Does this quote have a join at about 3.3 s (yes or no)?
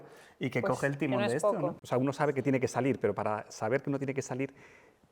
no